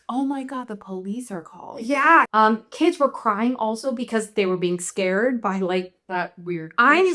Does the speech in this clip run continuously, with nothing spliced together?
no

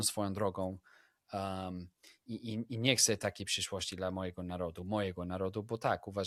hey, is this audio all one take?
yes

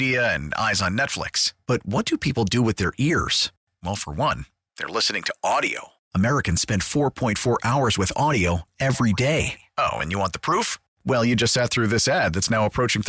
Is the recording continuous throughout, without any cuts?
yes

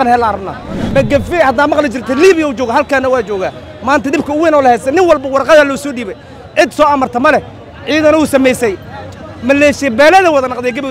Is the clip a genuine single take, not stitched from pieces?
no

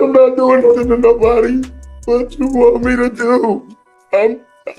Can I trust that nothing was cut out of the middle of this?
yes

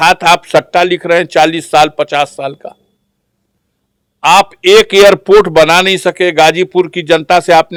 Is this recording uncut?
yes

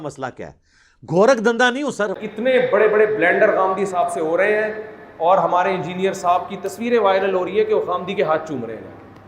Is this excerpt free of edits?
no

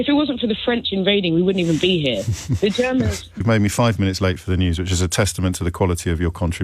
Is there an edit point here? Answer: yes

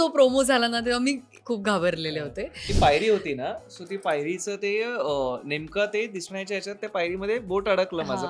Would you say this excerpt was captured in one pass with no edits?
no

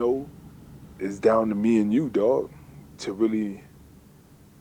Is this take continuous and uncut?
no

